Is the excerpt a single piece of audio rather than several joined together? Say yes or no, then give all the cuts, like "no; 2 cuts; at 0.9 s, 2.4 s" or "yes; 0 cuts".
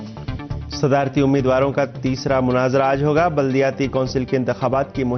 yes; 0 cuts